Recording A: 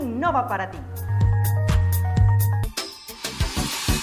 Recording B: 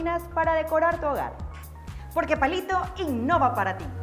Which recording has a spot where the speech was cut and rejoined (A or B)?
A